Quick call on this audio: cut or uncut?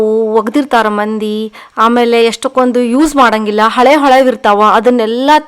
uncut